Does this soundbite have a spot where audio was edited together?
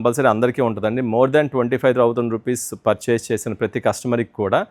no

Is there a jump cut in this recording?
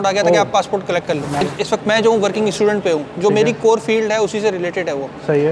yes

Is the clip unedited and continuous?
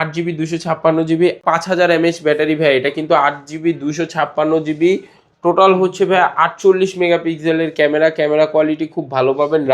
no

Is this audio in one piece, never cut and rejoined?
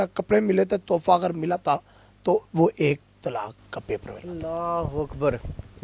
yes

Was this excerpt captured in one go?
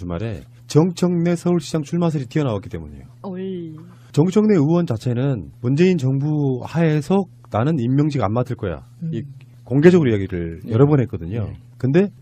no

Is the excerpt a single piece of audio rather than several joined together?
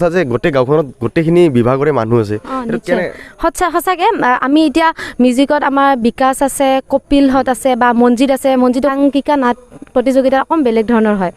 no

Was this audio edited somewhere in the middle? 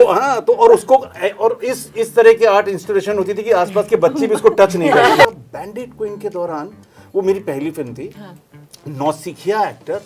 yes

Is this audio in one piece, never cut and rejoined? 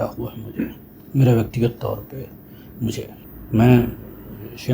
no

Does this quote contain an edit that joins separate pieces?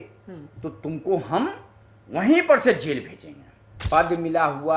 yes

